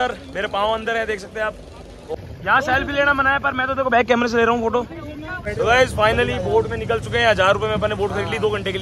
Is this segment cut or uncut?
cut